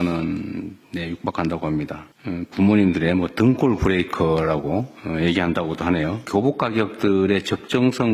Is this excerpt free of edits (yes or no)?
no